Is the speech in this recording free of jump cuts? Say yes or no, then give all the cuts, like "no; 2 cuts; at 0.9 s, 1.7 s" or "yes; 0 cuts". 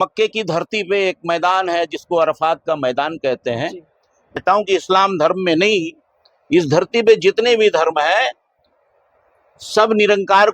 no; 1 cut; at 4.4 s